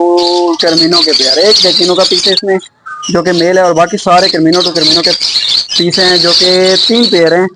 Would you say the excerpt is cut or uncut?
uncut